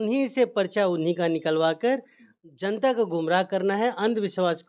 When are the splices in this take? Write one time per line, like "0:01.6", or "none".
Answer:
none